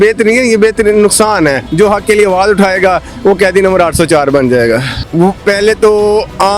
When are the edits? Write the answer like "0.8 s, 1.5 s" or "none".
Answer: 1.6 s, 5.0 s

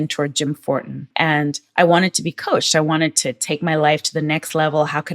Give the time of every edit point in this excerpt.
1.1 s

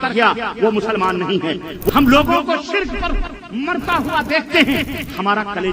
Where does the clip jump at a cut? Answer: 1.7 s

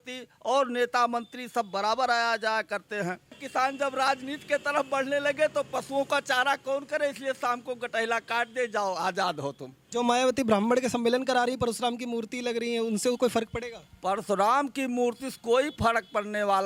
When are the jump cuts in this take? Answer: 3.4 s, 9.7 s

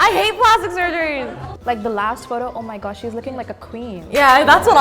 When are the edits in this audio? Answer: 1.1 s

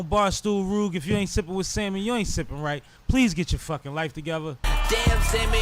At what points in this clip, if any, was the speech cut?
4.7 s

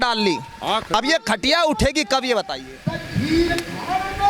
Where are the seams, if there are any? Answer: none

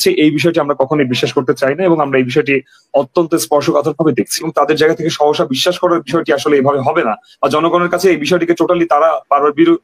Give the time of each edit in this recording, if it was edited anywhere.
4.5 s

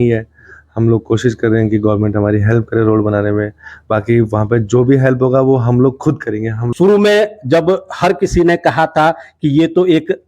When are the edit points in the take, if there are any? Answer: 6.6 s

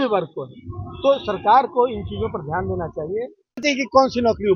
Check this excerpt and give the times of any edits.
3.6 s

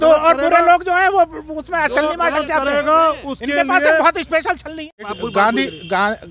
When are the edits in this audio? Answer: 5.0 s

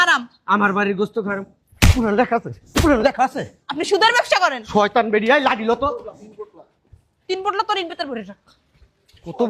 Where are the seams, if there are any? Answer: none

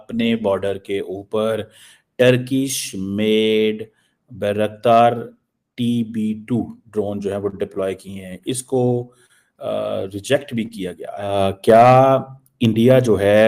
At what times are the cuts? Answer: none

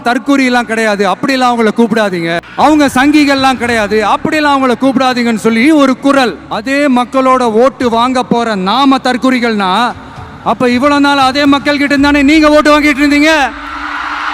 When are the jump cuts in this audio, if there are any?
2.4 s, 6.5 s

